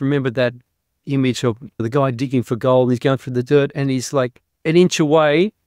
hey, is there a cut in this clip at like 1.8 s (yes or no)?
yes